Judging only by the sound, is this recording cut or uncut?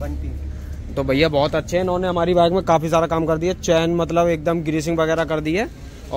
uncut